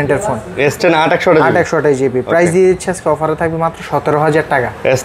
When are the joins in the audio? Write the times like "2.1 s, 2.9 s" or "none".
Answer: none